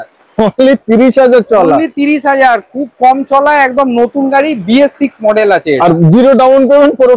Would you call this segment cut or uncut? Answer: uncut